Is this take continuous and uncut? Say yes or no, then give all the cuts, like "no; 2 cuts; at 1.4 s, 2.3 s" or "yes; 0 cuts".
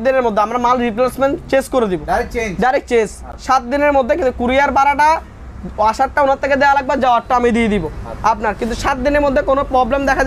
yes; 0 cuts